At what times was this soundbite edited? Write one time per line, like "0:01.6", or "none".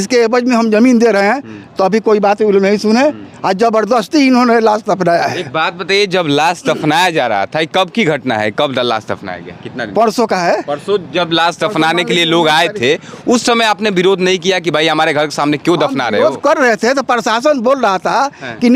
none